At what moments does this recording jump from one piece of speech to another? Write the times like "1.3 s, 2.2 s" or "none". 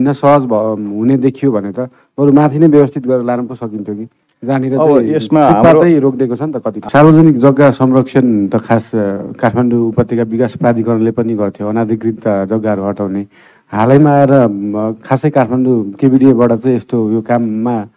6.8 s